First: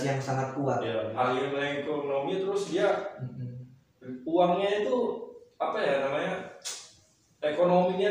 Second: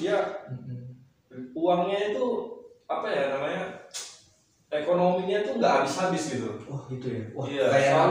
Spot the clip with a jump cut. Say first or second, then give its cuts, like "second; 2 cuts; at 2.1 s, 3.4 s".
first; 1 cut; at 1.1 s